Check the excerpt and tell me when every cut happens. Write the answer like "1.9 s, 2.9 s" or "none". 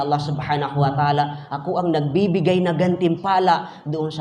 none